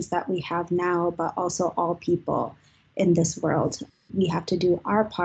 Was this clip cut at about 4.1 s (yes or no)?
yes